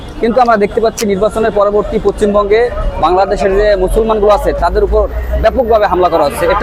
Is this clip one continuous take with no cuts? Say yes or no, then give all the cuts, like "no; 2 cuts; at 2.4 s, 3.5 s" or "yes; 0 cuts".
yes; 0 cuts